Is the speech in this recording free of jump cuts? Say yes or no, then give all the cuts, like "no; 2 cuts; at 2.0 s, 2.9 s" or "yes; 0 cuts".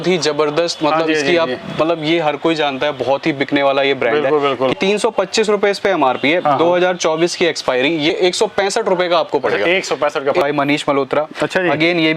no; 3 cuts; at 4.7 s, 8.1 s, 10.4 s